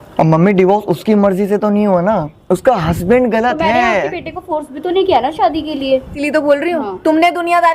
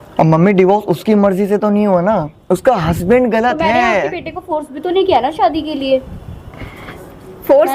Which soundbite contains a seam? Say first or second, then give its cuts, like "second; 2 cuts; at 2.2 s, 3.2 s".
first; 1 cut; at 6.1 s